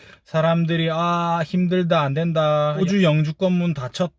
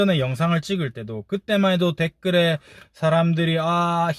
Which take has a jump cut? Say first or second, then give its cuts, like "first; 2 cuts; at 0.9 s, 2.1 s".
first; 1 cut; at 2.8 s